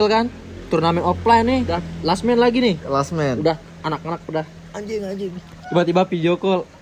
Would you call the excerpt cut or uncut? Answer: cut